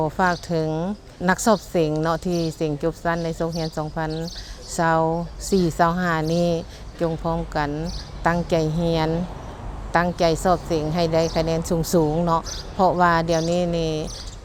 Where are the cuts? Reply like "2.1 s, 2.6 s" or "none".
none